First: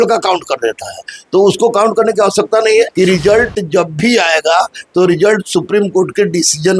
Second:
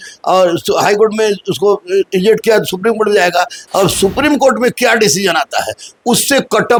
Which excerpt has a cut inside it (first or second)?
first